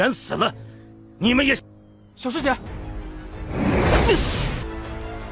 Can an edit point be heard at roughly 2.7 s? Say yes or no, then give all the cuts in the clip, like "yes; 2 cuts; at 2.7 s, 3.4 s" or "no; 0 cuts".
yes; 1 cut; at 2.7 s